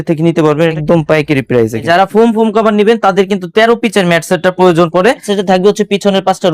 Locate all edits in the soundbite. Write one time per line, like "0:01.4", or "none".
0:00.8
0:01.9
0:05.3